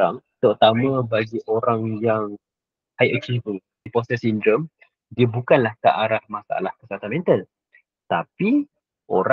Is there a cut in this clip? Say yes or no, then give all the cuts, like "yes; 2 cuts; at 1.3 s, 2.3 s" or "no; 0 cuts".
yes; 1 cut; at 3.9 s